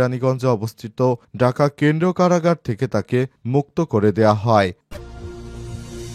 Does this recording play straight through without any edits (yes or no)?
no